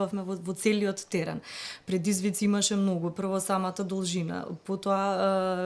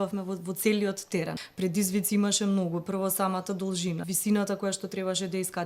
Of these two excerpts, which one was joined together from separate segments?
second; 2 cuts; at 1.4 s, 4.0 s

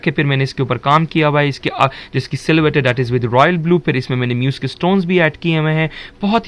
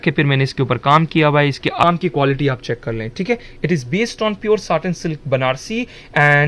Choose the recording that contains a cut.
second; 1 cut; at 1.8 s

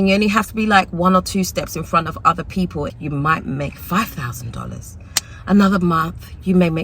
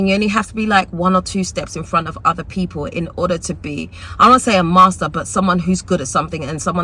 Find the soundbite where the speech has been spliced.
first; 1 cut; at 2.9 s

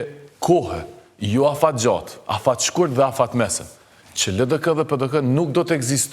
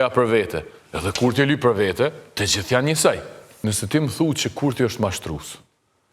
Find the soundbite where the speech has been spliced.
second; 1 cut; at 3.4 s

